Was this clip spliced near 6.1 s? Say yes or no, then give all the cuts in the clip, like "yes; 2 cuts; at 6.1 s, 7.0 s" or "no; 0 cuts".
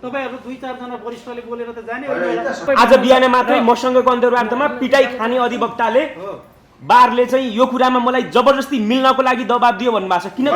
no; 1 cut; at 2.6 s